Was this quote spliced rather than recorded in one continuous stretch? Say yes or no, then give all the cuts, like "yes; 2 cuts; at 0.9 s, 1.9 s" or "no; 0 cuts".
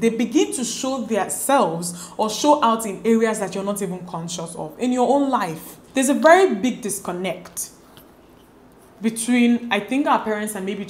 yes; 1 cut; at 5.8 s